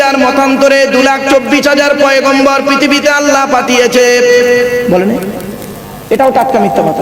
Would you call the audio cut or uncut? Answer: uncut